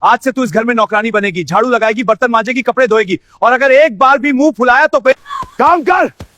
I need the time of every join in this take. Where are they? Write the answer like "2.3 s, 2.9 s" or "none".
5.2 s